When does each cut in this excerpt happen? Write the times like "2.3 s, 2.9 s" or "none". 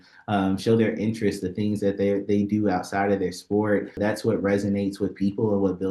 4.0 s